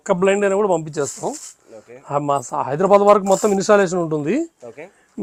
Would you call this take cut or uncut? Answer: uncut